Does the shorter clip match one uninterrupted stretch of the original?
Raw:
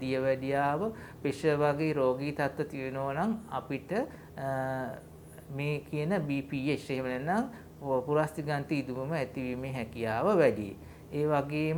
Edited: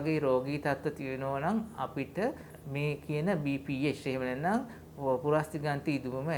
no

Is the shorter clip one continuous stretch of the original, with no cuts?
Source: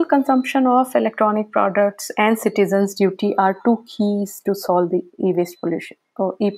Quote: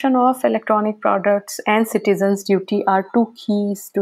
yes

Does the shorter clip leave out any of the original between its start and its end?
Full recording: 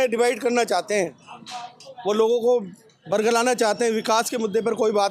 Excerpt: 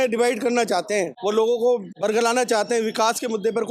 yes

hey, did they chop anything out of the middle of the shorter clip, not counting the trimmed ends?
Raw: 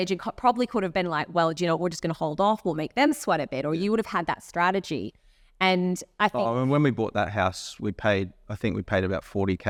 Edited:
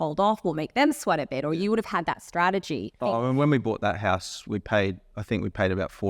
yes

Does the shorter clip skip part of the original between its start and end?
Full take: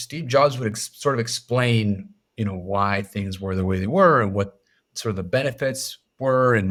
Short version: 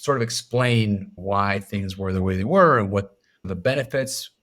yes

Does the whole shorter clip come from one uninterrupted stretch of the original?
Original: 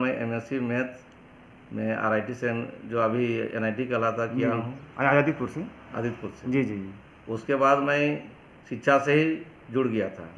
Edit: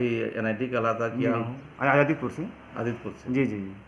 yes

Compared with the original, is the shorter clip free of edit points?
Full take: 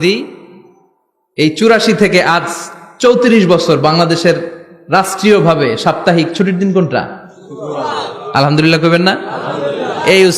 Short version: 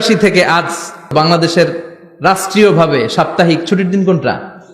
no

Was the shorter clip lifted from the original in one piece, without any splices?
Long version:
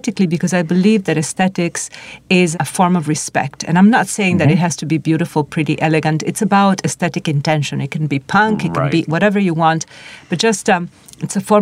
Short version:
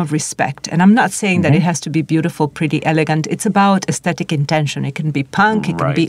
yes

